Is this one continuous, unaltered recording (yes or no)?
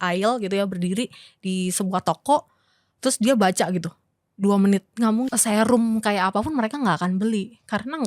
no